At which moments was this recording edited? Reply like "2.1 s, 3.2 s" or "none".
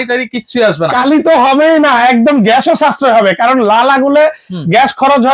none